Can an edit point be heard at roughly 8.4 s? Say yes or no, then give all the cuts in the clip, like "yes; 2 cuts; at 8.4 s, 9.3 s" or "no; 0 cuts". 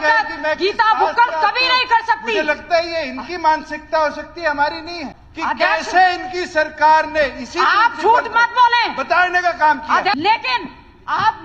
no; 2 cuts; at 5.0 s, 10.2 s